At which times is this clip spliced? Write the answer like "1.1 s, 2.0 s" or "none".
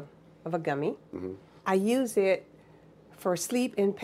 1.5 s

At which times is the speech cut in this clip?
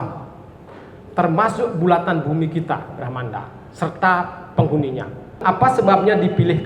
5.4 s

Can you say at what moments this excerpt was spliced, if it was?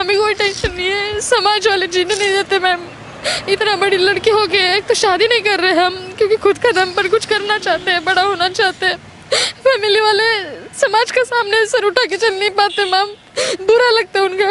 none

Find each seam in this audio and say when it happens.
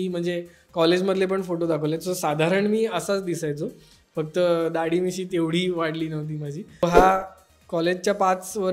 6.8 s

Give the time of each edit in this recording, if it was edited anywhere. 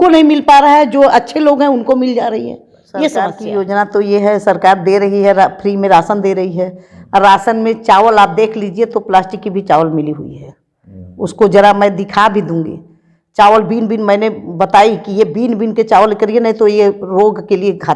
3.4 s

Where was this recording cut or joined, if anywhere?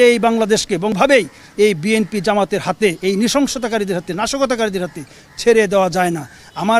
0.9 s

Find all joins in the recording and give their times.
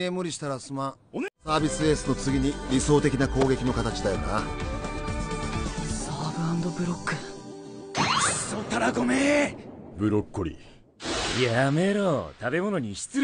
1.4 s

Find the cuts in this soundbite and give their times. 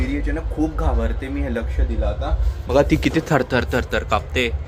none

